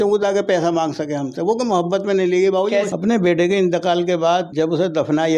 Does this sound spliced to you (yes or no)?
yes